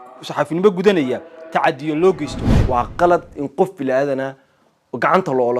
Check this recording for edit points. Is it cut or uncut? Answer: cut